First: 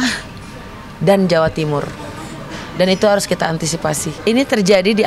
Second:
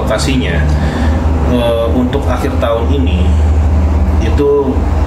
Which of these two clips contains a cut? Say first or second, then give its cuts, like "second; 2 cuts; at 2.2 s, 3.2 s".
first; 1 cut; at 4.1 s